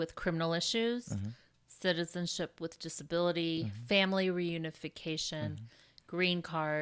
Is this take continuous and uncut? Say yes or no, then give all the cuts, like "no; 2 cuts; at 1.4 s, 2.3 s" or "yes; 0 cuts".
yes; 0 cuts